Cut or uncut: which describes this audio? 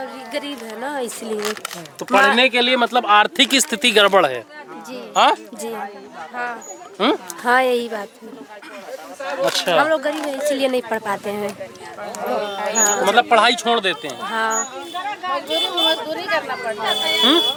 uncut